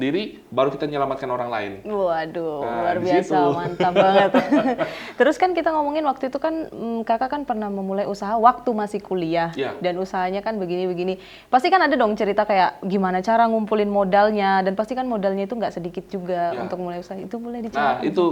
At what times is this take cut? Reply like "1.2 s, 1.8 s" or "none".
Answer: none